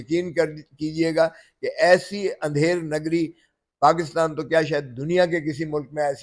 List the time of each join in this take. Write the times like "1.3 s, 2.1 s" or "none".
none